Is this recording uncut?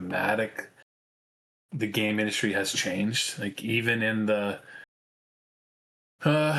yes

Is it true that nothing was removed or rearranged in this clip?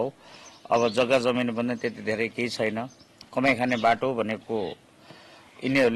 yes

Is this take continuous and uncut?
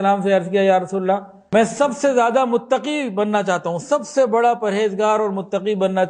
no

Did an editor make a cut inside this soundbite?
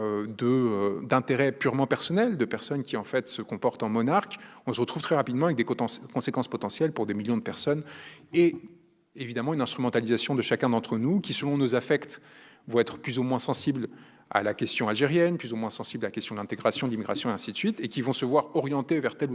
no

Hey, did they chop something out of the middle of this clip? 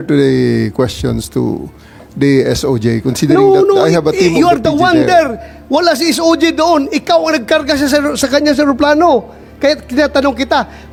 no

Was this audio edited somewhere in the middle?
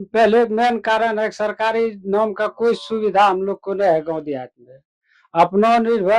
no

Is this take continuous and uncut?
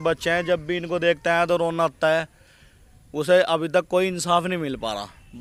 yes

